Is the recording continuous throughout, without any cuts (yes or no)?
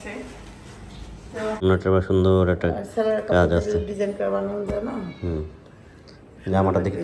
no